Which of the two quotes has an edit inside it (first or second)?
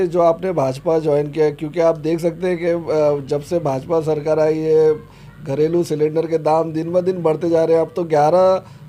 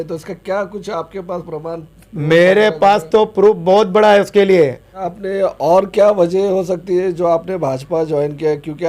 second